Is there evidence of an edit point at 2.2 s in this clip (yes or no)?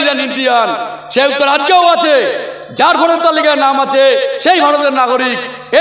no